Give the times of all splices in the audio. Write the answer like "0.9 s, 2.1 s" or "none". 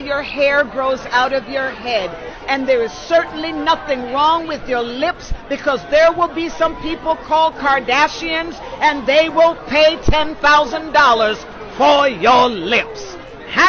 2.3 s, 7.4 s